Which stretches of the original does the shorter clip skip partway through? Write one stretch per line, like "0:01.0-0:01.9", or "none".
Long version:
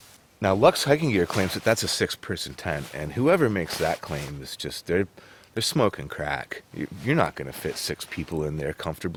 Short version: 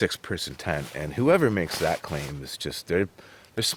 none